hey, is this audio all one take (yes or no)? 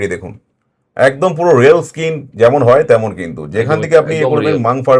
yes